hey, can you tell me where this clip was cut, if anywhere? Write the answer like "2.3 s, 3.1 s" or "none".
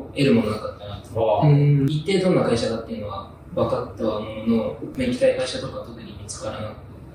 none